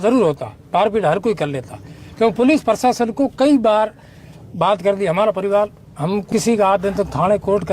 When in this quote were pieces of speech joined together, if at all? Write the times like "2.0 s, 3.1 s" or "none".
6.2 s